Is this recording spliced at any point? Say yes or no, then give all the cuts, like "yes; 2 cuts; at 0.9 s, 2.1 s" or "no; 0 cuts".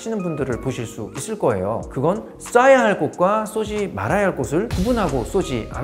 no; 0 cuts